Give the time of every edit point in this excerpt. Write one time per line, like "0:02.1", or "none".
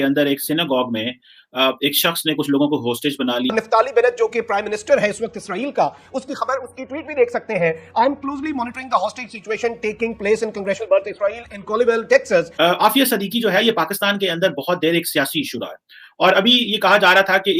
0:03.5
0:12.5